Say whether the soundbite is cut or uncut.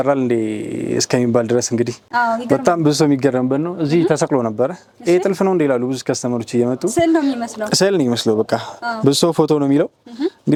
uncut